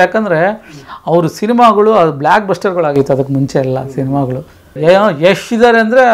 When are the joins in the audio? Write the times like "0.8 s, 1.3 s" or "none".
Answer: 4.6 s

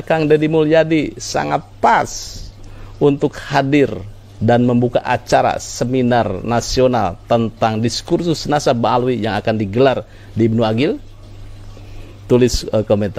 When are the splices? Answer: none

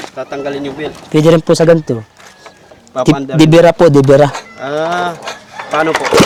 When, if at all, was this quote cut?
none

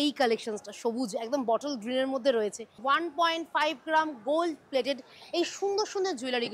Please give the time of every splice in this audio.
2.8 s

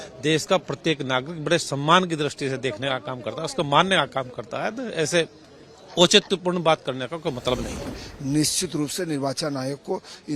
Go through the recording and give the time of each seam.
8.0 s

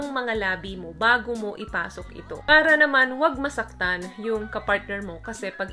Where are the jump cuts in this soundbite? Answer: 2.3 s

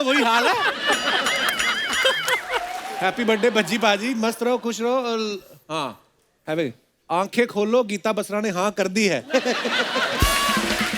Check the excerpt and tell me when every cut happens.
2.9 s

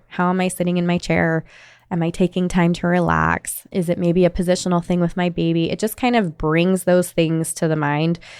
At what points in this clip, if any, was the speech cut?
3.6 s

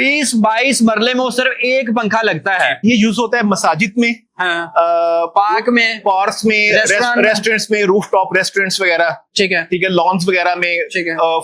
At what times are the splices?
2.8 s

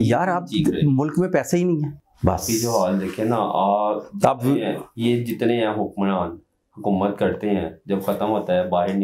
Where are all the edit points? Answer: 2.0 s

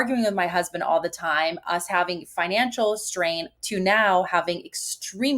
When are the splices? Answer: 3.5 s

